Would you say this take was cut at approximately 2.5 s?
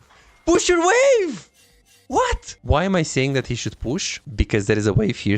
yes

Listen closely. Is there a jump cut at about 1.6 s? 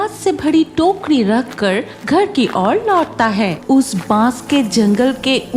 no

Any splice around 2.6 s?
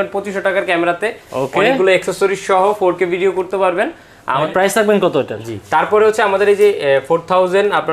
no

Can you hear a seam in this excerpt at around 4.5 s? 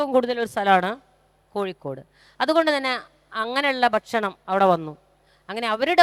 no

